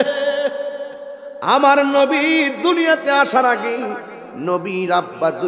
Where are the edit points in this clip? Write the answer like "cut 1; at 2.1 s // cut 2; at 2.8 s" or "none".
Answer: none